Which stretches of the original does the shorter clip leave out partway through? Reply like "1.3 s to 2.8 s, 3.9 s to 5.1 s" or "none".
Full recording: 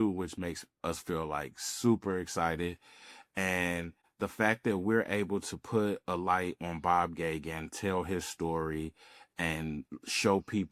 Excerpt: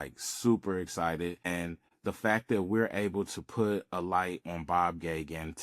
2.8 s to 3.6 s